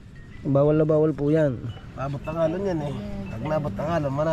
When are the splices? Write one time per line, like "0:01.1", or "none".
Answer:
none